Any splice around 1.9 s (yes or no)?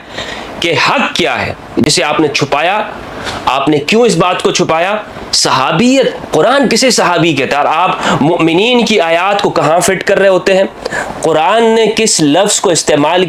no